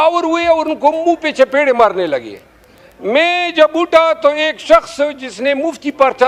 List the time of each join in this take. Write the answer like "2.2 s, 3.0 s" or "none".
none